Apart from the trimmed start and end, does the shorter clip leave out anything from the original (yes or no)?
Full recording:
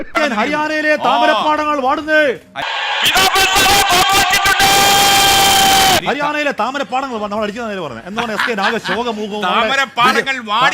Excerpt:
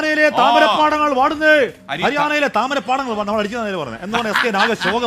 yes